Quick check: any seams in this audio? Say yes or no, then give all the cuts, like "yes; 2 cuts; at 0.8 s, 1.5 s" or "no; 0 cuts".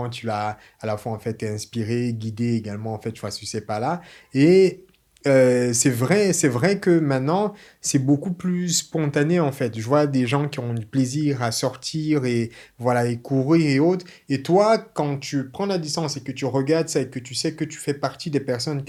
no; 0 cuts